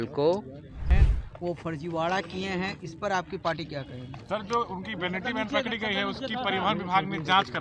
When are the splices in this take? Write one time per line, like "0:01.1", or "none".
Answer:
0:01.0